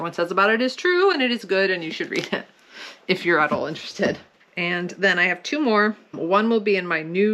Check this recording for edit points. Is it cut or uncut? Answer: uncut